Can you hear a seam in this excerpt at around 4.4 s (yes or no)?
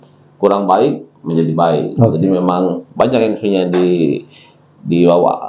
no